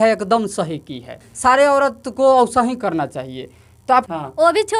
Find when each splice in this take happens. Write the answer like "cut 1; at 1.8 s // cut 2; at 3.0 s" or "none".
cut 1; at 1.2 s // cut 2; at 4.1 s